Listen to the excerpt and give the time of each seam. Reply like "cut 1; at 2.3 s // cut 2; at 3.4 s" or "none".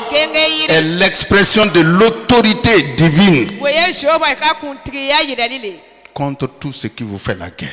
cut 1; at 1.6 s